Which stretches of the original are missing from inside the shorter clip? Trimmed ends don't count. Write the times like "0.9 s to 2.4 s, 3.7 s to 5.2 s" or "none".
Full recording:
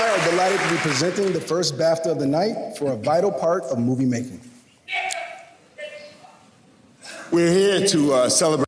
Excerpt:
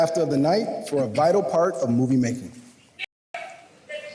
none